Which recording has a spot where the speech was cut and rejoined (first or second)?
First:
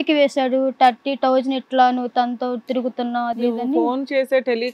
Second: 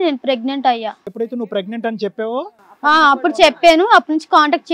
second